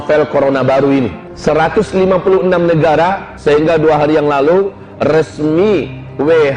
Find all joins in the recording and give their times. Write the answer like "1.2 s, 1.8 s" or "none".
1.2 s, 3.3 s